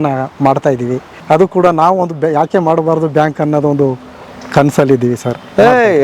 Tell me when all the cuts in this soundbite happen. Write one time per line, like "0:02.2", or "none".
0:01.1